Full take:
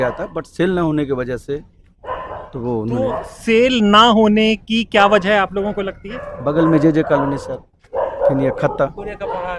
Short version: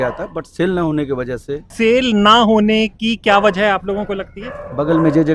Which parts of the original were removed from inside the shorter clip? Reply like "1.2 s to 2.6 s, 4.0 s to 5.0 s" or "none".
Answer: 1.7 s to 3.3 s